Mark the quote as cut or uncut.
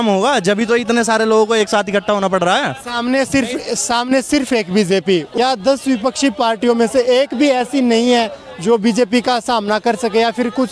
cut